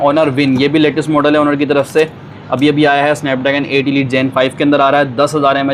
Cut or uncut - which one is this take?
uncut